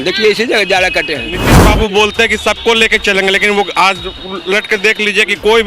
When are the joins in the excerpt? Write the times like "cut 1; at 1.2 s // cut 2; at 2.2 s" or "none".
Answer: cut 1; at 1.5 s